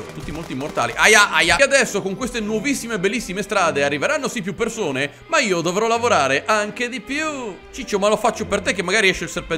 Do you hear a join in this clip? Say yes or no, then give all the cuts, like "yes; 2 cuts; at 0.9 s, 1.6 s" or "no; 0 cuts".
yes; 2 cuts; at 1.6 s, 7.7 s